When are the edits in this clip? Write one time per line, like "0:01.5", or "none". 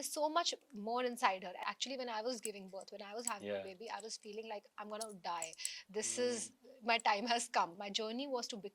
0:01.6
0:07.9

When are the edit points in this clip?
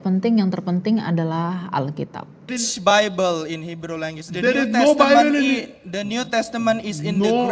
0:02.5

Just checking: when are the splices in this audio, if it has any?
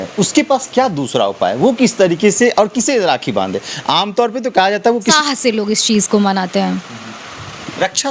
0:05.1

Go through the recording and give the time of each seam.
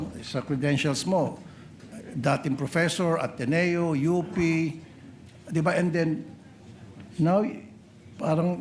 none

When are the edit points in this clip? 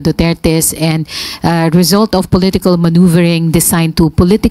none

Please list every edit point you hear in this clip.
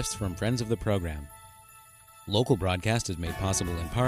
none

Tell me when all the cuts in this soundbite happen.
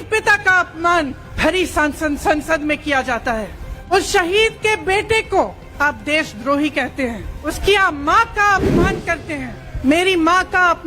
0:01.2
0:03.9
0:05.6
0:07.4
0:09.6

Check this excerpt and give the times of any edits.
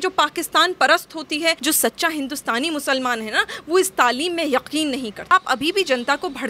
0:01.6
0:05.3

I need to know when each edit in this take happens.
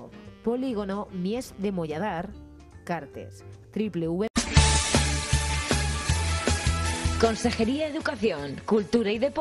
0:04.3

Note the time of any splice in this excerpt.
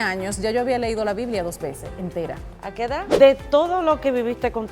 0:02.9

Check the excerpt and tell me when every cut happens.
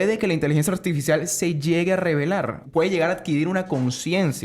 0:02.6

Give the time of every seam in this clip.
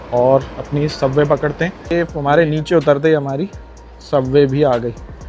0:01.8

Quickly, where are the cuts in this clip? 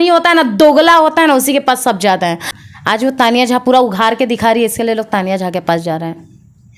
0:02.5

